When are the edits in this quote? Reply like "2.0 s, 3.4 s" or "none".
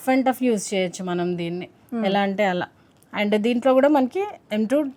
none